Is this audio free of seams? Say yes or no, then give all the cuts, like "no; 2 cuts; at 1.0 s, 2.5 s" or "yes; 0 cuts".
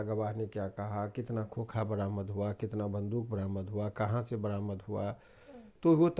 yes; 0 cuts